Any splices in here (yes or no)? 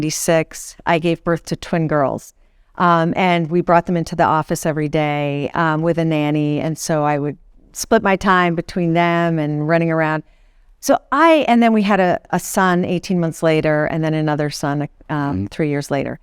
no